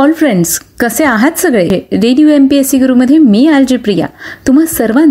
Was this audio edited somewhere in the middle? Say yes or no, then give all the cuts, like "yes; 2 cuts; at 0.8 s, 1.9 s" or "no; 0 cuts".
yes; 1 cut; at 1.7 s